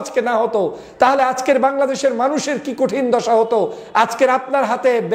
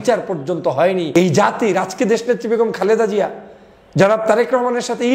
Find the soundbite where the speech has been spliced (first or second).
second